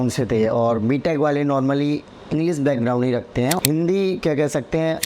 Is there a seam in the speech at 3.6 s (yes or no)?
yes